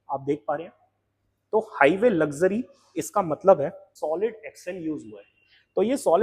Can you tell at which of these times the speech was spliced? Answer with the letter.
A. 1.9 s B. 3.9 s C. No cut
B